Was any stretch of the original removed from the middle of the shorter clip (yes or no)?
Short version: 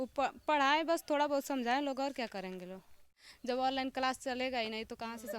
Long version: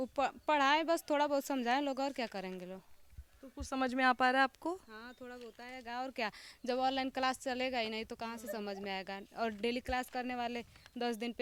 yes